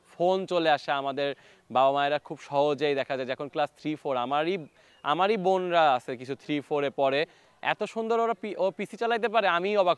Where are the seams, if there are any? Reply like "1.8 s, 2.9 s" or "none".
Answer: none